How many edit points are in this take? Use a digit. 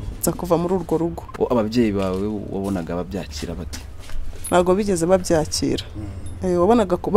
1